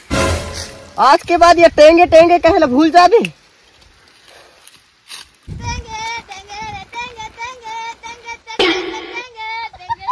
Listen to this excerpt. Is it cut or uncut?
uncut